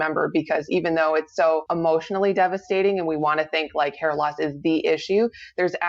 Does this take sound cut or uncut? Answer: cut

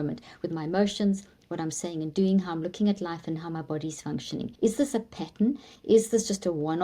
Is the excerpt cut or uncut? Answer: cut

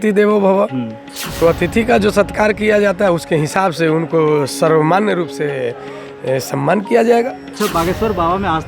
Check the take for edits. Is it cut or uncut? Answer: cut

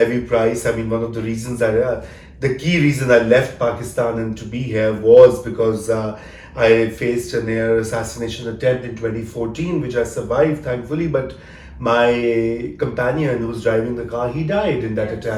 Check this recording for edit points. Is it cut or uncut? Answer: uncut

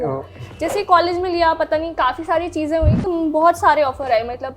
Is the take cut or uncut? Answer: cut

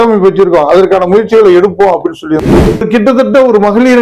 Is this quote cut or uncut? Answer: cut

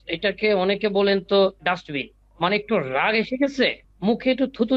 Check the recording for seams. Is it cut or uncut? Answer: cut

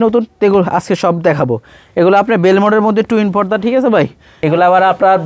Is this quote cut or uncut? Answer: cut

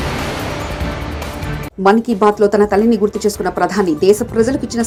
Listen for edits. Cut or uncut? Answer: uncut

